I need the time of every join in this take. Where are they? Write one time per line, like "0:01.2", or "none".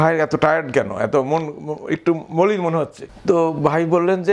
0:03.0